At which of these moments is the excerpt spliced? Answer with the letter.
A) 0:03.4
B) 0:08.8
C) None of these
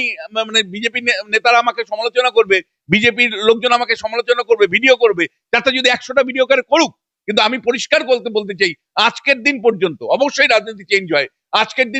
C